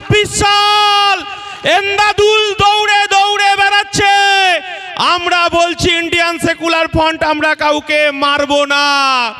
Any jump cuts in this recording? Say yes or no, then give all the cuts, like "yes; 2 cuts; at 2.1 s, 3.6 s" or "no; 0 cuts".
no; 0 cuts